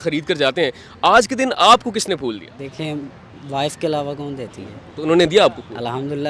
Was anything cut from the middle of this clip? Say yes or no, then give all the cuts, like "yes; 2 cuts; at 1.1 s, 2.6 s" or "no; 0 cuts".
yes; 1 cut; at 2.6 s